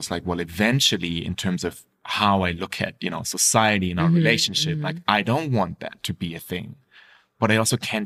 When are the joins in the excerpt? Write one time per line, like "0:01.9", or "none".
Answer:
none